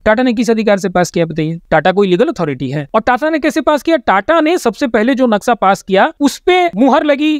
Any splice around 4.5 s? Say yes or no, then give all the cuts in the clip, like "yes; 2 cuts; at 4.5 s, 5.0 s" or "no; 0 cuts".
no; 3 cuts; at 1.6 s, 2.8 s, 6.4 s